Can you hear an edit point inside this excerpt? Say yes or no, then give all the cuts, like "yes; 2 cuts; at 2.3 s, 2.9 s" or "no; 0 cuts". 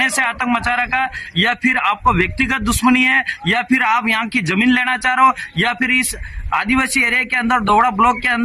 no; 0 cuts